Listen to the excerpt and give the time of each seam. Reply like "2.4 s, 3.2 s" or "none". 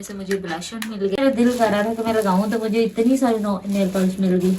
1.2 s

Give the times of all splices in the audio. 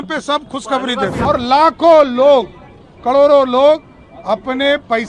1.2 s

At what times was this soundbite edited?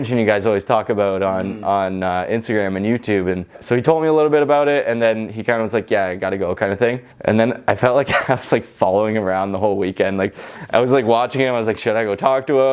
3.6 s, 7.1 s

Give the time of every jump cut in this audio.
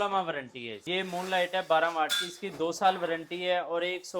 1.0 s

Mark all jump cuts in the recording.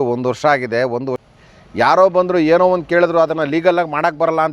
1.2 s

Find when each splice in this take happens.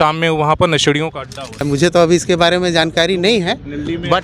1.6 s

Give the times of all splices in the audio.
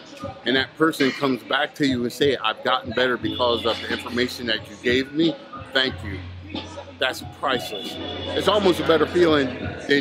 8.1 s

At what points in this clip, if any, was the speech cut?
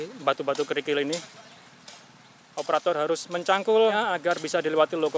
3.9 s

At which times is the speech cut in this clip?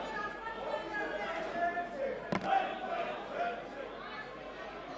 none

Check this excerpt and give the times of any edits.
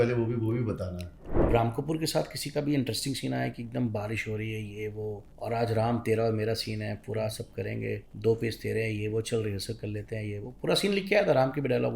1.4 s, 5.3 s, 8.1 s

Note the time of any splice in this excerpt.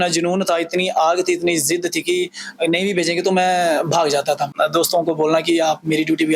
4.5 s

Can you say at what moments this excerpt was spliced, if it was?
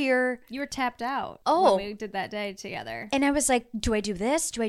1.3 s

